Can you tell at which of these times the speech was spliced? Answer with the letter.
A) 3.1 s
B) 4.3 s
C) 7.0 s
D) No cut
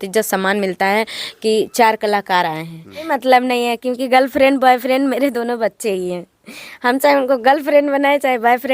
A